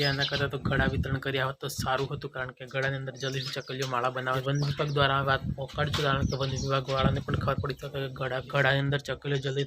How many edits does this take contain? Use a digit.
2